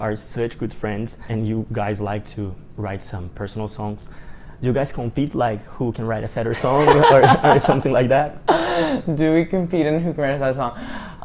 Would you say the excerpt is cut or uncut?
cut